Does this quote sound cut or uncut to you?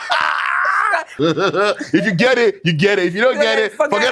cut